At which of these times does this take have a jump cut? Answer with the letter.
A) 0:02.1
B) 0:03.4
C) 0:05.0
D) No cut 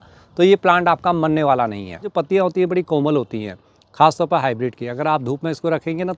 A